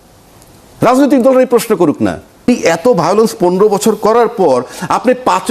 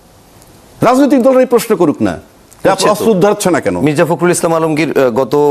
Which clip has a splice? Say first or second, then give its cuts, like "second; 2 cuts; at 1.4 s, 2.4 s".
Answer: first; 1 cut; at 2.5 s